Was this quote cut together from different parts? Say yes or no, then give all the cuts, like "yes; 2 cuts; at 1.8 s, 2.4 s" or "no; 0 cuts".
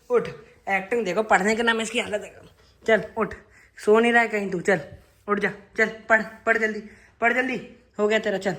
no; 0 cuts